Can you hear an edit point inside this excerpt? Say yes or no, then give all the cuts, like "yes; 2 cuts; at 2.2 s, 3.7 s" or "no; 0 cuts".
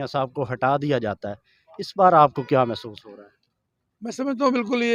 no; 0 cuts